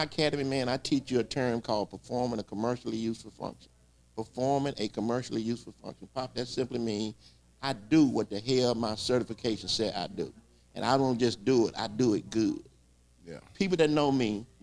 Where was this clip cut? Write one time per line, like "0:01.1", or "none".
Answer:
none